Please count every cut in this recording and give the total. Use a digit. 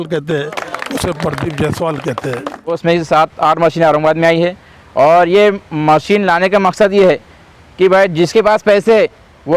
1